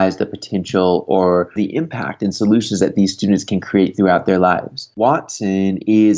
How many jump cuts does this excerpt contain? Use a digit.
2